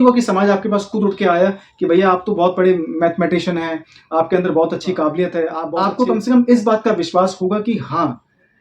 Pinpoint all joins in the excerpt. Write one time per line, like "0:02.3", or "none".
0:05.7